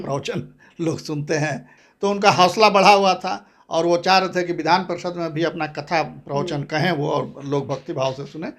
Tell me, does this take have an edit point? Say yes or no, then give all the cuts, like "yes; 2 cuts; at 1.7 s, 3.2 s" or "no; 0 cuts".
yes; 1 cut; at 1.7 s